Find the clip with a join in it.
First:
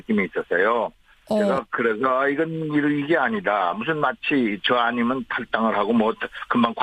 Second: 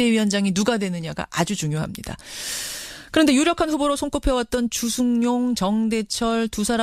first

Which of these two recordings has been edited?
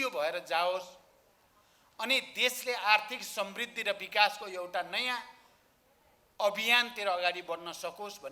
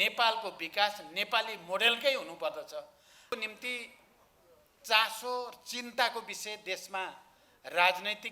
second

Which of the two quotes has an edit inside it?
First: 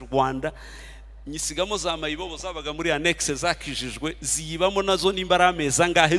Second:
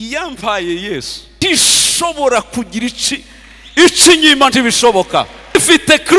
second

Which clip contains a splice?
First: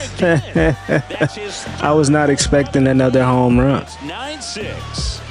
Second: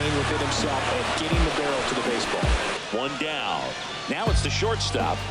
second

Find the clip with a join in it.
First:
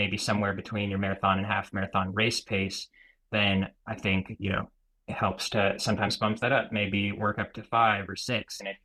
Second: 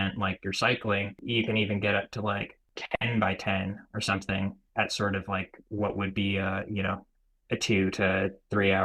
second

